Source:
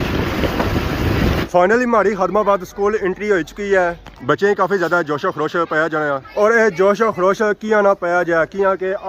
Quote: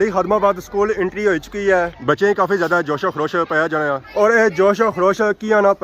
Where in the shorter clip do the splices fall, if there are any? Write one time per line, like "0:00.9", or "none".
0:01.9